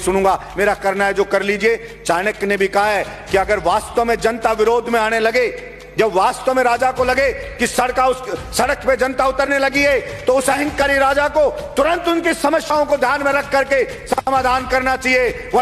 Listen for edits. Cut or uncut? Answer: uncut